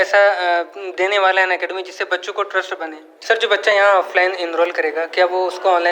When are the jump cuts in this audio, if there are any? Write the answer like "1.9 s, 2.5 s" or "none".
3.1 s